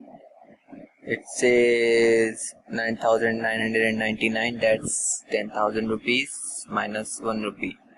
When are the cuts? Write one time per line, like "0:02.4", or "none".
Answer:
0:02.8